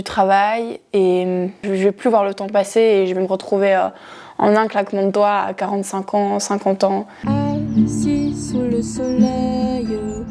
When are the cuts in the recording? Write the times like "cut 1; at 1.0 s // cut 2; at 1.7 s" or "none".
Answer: cut 1; at 1.6 s // cut 2; at 7.1 s